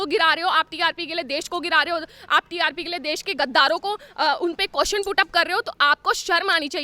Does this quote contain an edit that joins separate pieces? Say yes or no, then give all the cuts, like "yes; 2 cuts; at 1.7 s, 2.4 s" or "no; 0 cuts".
no; 0 cuts